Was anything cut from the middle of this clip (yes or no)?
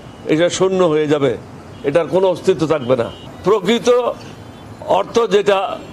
yes